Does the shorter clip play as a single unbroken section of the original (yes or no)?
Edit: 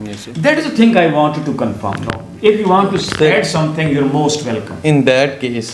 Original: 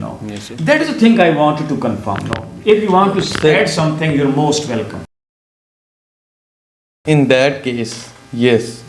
no